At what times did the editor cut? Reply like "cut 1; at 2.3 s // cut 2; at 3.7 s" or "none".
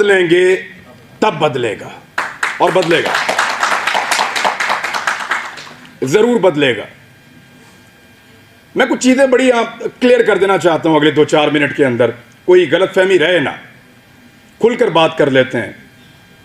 none